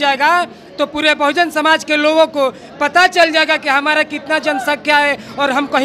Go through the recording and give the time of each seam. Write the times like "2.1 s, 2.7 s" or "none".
none